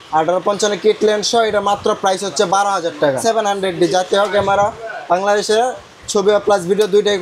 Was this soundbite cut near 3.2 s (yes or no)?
yes